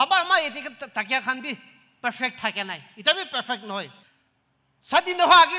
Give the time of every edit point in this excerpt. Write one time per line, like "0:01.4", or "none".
0:04.0

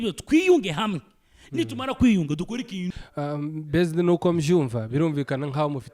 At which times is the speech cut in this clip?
0:03.0

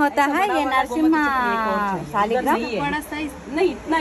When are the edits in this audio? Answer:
none

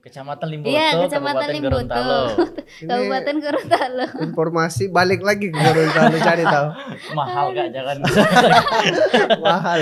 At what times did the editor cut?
none

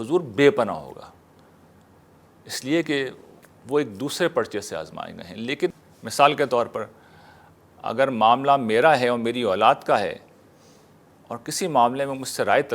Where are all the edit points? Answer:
0:05.7

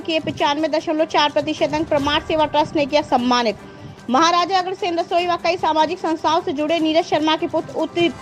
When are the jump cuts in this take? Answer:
none

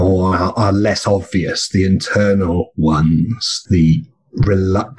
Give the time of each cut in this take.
0:03.6

